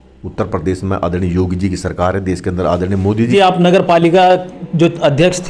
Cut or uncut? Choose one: cut